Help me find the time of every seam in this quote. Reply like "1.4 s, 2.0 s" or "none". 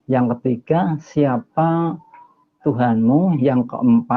none